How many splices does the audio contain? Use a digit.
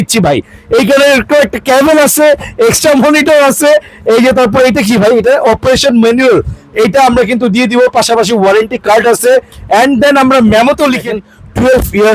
1